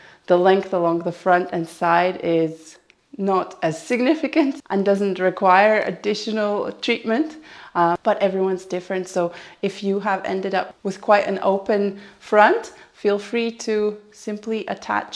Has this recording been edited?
no; 0 cuts

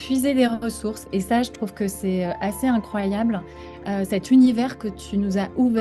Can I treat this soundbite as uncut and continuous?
no; 1 cut; at 1.0 s

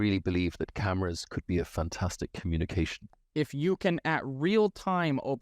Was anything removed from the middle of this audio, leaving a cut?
yes; 1 cut; at 3.2 s

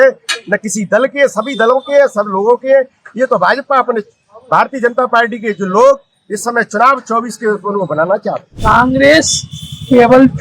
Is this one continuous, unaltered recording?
no; 1 cut; at 8.5 s

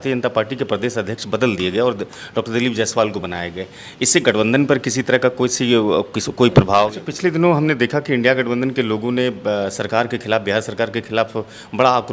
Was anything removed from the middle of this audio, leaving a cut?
yes; 1 cut; at 7.0 s

